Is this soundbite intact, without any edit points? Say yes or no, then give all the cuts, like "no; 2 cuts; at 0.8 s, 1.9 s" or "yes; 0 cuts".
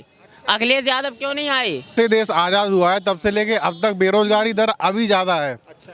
no; 1 cut; at 1.9 s